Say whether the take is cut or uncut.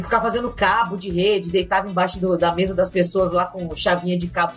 uncut